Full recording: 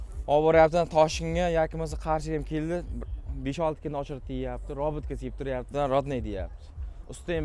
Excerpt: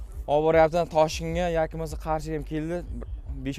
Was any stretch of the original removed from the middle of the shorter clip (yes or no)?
no